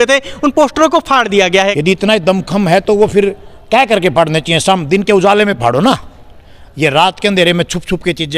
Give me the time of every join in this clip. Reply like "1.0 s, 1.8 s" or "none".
1.7 s